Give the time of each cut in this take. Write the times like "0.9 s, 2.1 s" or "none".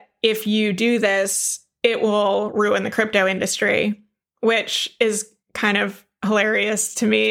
none